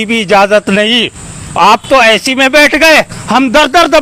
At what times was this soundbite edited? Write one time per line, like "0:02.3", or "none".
none